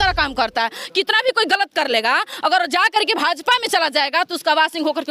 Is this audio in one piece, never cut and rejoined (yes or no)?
yes